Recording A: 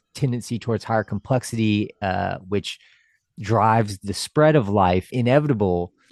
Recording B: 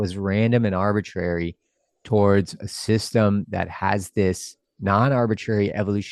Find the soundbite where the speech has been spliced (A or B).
A